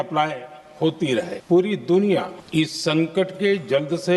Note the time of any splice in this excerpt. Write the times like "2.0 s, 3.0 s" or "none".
1.4 s, 2.4 s